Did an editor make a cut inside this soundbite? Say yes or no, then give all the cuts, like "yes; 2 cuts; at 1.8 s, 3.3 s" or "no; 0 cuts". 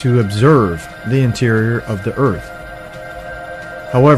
yes; 1 cut; at 1.4 s